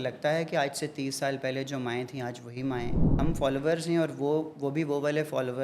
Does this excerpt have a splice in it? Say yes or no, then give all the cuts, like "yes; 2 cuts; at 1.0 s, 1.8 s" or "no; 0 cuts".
yes; 1 cut; at 3.1 s